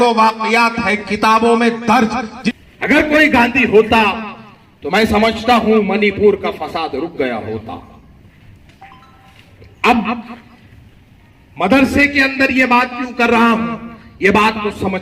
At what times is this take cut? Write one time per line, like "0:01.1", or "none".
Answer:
0:02.4